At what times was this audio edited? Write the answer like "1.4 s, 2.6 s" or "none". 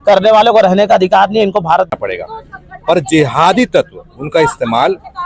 1.9 s